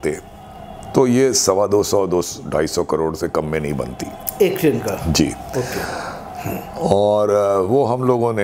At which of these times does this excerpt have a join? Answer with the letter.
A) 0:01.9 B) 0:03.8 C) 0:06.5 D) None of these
D